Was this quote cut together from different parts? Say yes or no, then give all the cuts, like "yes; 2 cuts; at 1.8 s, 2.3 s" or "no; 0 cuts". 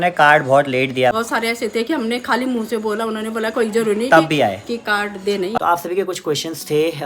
yes; 2 cuts; at 1.1 s, 5.5 s